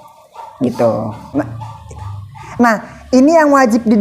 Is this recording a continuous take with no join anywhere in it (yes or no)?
no